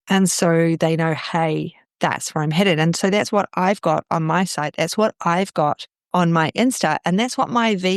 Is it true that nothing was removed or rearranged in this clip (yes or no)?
yes